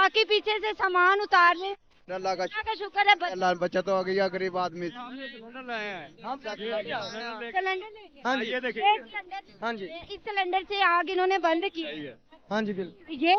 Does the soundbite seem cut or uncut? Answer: uncut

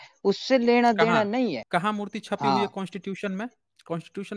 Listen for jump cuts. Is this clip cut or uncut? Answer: cut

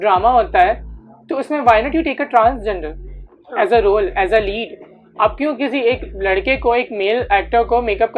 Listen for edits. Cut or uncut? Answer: uncut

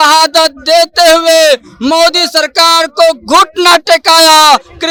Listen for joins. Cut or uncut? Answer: uncut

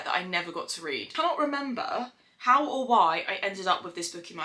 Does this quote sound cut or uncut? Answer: cut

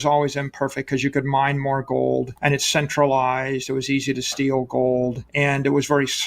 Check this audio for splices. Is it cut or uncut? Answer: cut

